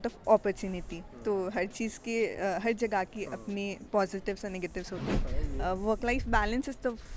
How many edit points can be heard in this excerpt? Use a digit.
1